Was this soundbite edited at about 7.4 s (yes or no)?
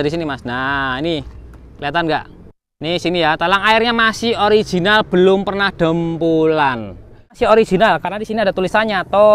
yes